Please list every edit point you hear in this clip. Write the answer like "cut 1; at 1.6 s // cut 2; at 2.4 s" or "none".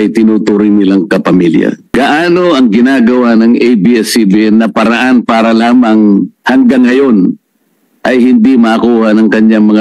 cut 1; at 1.9 s